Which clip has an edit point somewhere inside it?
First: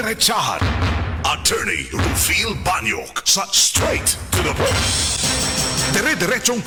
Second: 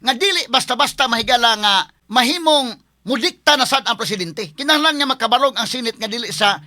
second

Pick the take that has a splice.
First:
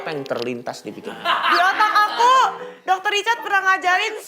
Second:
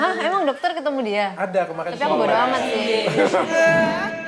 first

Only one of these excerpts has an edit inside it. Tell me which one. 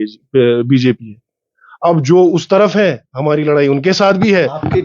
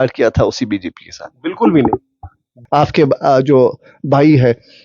second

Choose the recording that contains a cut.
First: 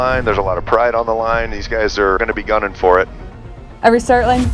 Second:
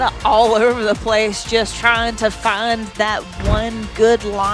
first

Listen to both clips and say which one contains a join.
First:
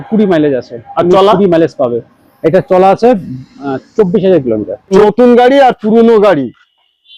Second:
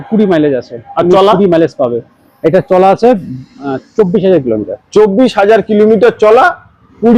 first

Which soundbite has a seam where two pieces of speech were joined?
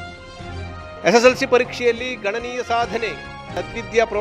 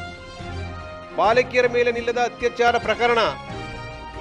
second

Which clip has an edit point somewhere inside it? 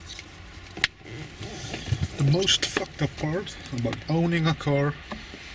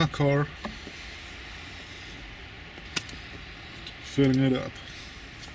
second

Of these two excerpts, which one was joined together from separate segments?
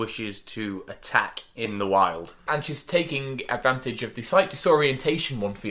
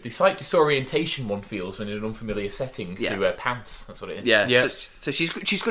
first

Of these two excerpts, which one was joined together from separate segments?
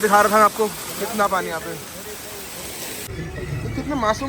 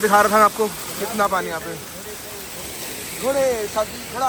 first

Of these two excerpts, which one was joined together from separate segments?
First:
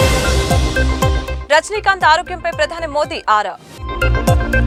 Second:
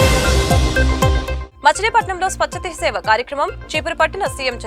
second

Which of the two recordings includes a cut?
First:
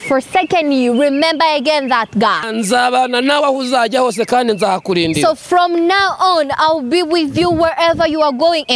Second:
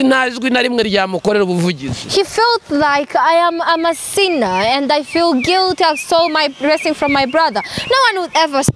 first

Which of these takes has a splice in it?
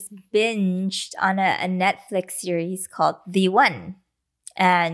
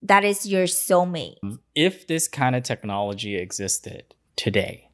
second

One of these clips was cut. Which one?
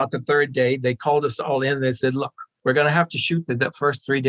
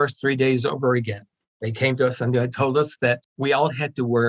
second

